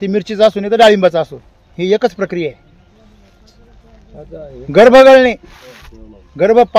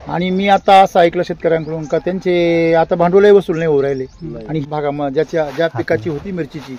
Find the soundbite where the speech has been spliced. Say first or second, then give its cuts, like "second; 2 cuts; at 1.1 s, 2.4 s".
second; 1 cut; at 4.7 s